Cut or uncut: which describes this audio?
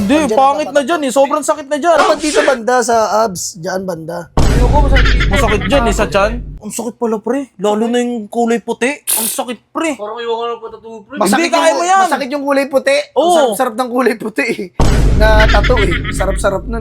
cut